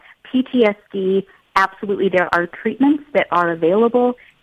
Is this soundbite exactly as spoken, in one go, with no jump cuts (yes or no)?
yes